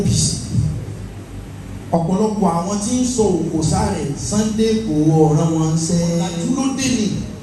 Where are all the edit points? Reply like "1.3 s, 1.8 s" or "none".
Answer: 6.4 s